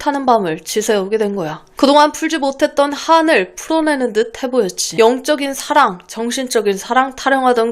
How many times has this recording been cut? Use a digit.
2